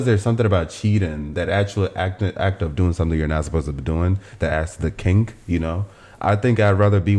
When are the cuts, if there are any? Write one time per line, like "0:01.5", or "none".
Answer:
none